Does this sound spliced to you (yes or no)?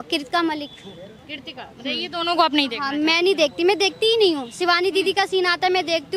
no